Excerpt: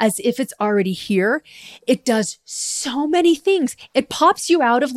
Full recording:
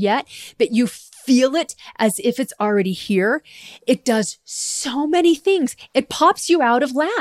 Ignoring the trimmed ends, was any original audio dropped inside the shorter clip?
no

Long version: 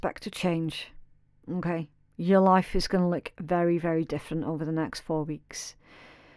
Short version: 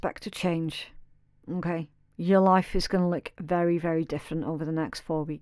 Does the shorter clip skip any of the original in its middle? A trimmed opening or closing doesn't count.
no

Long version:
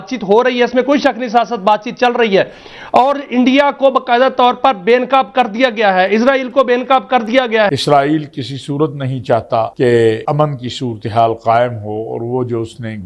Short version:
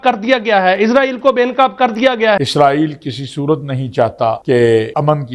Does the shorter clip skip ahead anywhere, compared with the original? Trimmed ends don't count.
no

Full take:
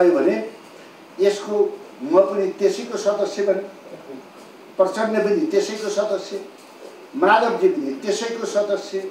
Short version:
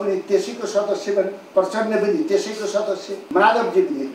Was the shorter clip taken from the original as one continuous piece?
no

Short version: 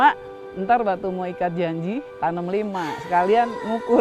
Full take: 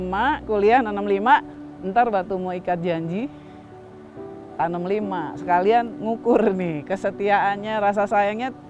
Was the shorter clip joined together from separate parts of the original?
yes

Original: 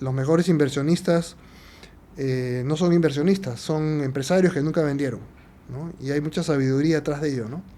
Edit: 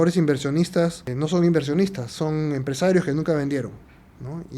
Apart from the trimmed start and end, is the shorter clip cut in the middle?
yes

